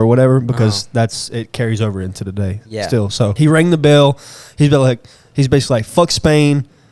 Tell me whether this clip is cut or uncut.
cut